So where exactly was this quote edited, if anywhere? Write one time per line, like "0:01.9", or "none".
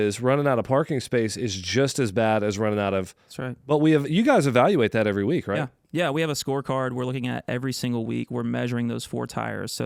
none